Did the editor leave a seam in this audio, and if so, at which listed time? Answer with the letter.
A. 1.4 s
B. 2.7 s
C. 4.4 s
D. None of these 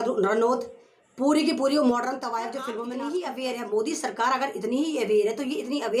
B